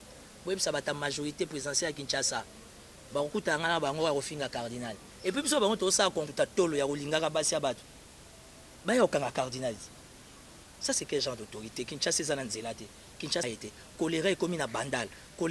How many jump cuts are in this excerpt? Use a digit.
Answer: 2